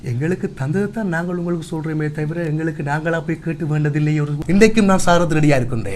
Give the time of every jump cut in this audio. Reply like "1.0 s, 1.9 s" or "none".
4.4 s